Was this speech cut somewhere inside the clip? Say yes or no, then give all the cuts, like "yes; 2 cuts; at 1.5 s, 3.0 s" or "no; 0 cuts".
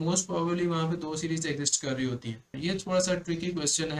yes; 1 cut; at 2.6 s